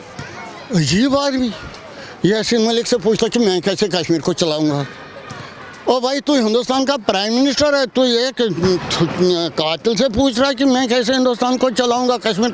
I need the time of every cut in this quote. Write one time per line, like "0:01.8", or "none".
none

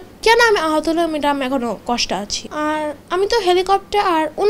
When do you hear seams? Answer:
0:02.4

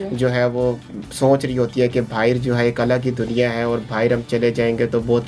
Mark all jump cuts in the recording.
none

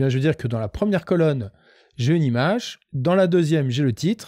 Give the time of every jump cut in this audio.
none

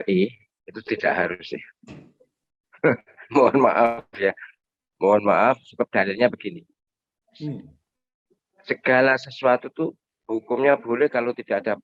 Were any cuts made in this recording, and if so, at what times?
none

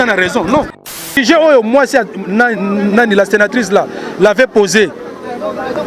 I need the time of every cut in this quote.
0:00.9

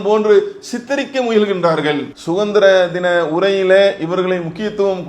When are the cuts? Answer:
0:02.1

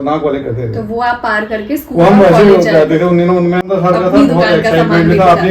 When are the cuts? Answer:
0:03.7

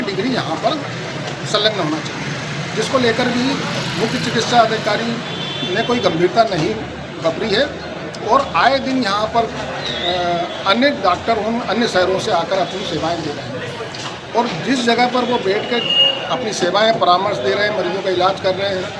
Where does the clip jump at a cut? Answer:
none

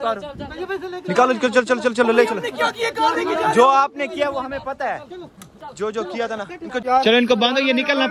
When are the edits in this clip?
0:06.7

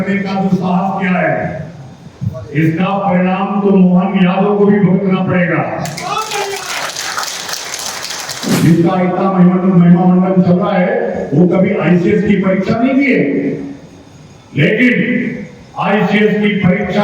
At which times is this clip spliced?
0:08.5

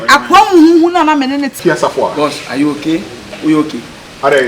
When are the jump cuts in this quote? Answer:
0:01.6

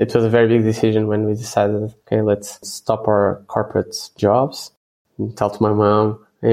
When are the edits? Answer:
none

